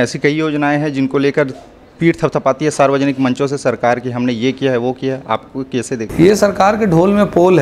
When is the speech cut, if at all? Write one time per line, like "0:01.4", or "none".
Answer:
none